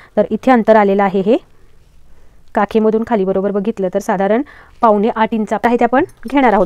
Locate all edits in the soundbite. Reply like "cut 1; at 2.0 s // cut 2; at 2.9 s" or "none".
cut 1; at 5.6 s